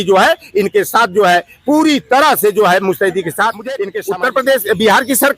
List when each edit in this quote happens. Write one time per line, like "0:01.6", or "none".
0:03.9